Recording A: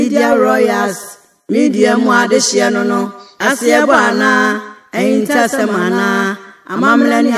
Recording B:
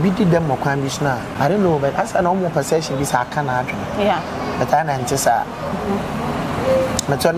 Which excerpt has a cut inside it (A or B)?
B